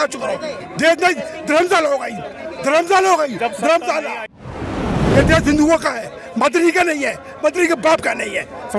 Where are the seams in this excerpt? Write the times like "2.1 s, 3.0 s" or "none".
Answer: 4.8 s